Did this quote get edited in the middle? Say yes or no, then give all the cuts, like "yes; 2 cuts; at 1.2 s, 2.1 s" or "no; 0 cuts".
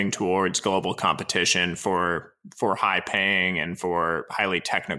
no; 0 cuts